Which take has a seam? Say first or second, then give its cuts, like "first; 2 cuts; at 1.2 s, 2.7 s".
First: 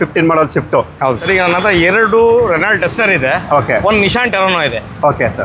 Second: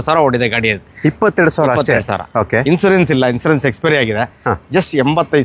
first; 1 cut; at 1.2 s